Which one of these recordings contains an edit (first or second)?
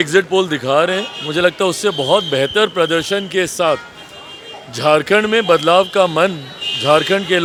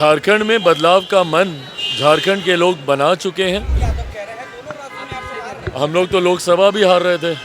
second